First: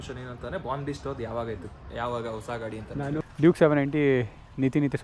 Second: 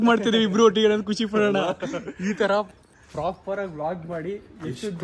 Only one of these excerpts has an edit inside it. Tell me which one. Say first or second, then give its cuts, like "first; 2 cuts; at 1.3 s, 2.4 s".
first; 1 cut; at 3.2 s